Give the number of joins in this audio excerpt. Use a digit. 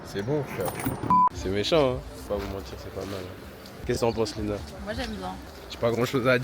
3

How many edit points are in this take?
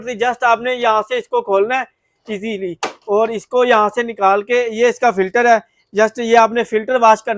0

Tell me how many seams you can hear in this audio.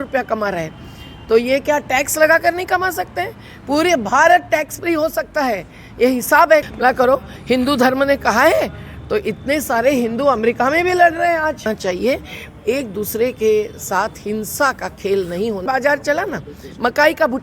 3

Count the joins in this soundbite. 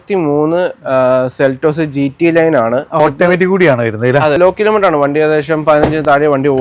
2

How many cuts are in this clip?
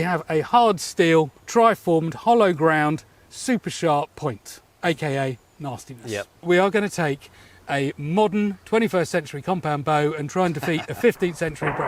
3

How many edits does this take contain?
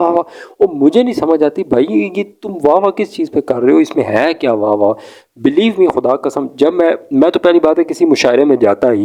0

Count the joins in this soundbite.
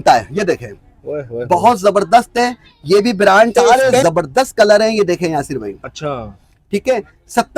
1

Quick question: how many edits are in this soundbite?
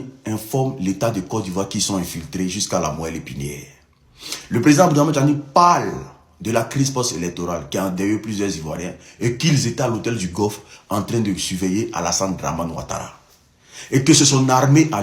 0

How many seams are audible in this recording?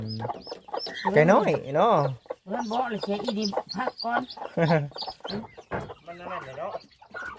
1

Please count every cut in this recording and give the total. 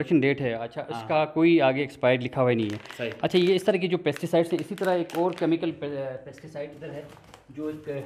0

